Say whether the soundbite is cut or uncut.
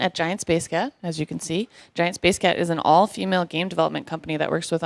cut